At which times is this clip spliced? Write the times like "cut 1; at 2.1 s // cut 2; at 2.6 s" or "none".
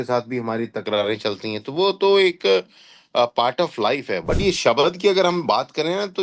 cut 1; at 4.2 s